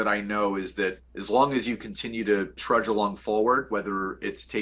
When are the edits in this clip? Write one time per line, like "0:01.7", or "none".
0:01.1
0:02.6